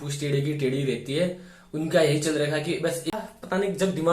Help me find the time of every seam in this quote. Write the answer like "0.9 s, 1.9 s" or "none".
3.2 s